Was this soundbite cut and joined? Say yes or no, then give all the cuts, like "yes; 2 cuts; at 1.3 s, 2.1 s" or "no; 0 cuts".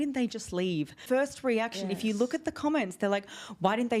yes; 1 cut; at 1.0 s